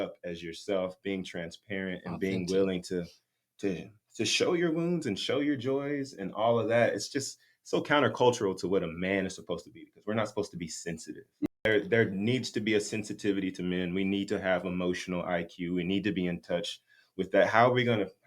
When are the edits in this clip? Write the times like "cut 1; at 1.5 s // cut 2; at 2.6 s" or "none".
cut 1; at 11.5 s